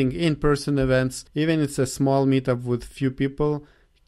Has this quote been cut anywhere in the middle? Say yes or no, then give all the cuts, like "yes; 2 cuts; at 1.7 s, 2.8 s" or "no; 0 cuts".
yes; 1 cut; at 1.2 s